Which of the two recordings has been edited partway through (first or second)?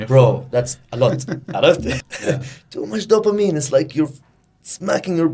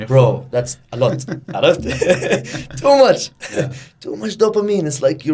first